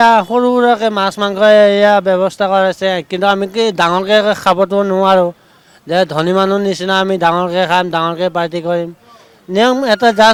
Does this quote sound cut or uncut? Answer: uncut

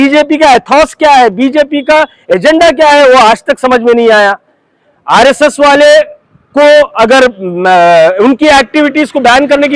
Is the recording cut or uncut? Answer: uncut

